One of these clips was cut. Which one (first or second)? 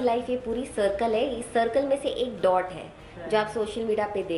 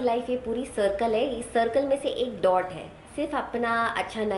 second